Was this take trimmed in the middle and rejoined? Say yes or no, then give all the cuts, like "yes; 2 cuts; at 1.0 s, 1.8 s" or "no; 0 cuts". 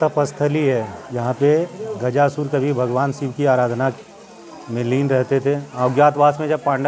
yes; 2 cuts; at 1.0 s, 5.7 s